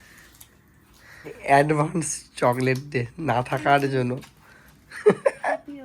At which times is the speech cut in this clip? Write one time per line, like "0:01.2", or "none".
0:01.3